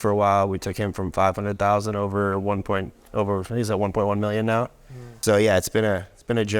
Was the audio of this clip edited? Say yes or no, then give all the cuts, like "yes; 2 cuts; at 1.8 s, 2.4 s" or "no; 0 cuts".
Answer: yes; 1 cut; at 5.2 s